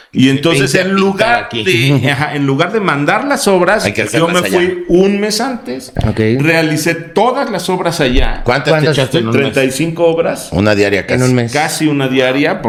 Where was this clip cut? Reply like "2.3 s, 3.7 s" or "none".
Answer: none